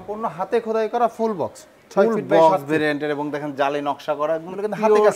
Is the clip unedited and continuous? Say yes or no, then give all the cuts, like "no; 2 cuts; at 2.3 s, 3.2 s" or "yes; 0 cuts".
yes; 0 cuts